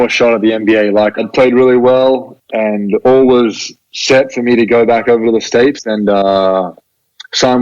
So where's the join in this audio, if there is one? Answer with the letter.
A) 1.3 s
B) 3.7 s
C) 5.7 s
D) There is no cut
A